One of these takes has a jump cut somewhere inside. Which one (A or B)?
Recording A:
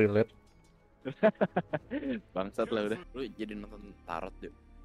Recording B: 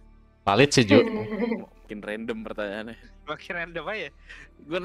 A